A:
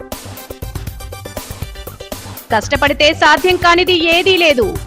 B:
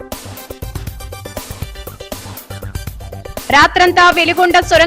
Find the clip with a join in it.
A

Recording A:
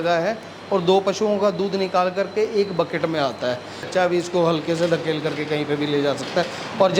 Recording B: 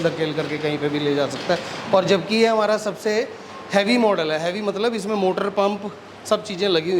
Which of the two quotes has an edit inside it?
A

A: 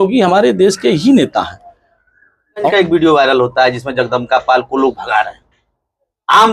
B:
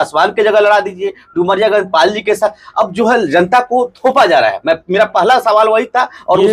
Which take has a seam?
A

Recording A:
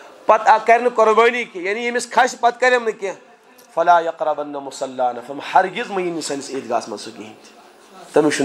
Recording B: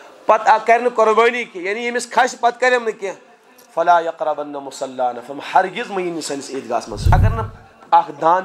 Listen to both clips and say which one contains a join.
B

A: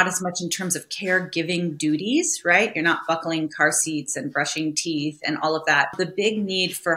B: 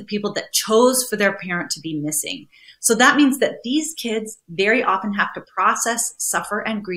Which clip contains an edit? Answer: A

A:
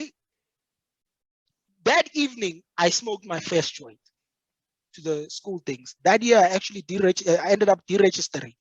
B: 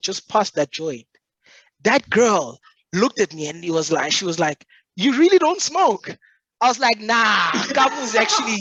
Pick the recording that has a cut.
A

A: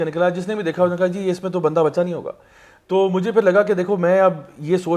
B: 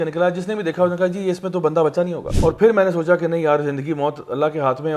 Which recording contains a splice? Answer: B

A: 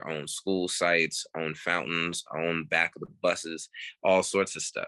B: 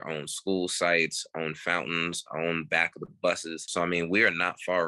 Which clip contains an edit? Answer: B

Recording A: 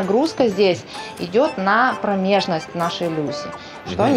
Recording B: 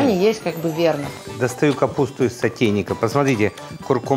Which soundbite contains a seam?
B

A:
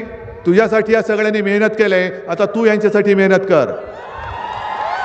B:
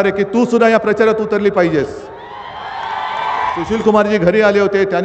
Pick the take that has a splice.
B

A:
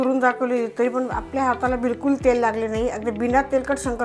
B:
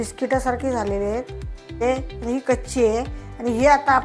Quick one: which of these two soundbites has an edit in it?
B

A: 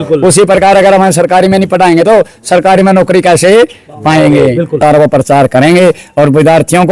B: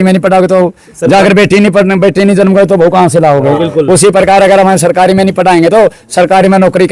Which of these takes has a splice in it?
A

